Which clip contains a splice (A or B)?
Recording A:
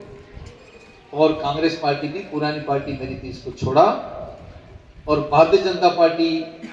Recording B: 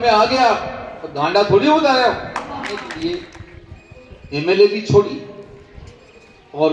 B